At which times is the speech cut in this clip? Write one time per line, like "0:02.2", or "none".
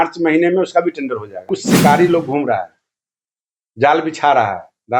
0:01.6